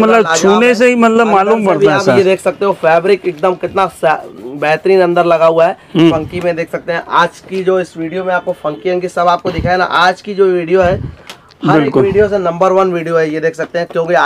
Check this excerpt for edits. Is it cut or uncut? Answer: cut